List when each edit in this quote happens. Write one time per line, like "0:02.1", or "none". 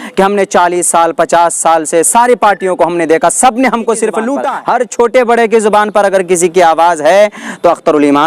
0:04.4